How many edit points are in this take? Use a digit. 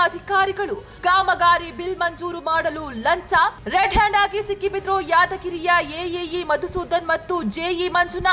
0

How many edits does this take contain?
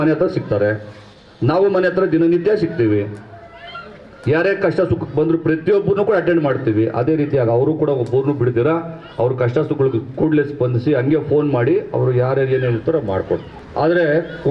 1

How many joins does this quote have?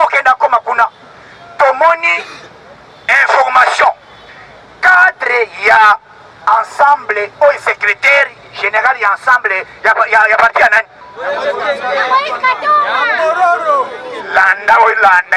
0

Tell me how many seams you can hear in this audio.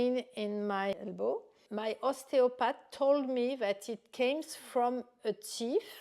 1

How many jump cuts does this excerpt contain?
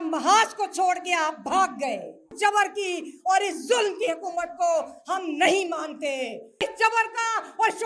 2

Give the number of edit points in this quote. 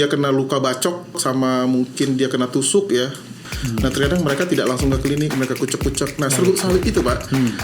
2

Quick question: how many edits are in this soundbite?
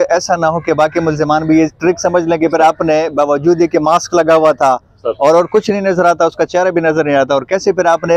0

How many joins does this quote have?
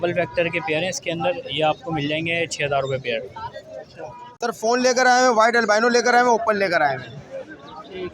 1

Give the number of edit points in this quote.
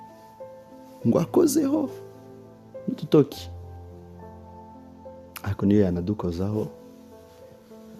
1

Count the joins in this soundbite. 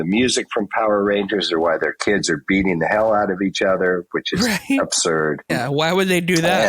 1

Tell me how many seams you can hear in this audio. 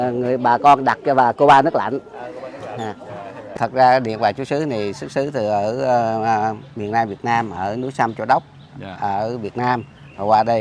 1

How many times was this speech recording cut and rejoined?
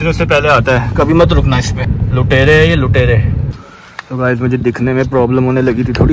2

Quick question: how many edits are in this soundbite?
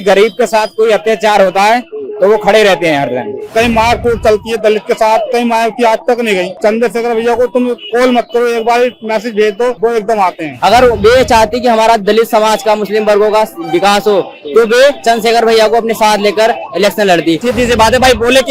4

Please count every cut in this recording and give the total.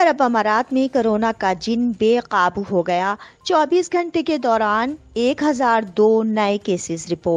0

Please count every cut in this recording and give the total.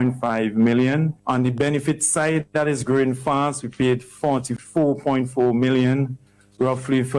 2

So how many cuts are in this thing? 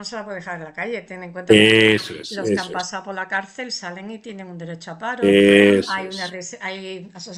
0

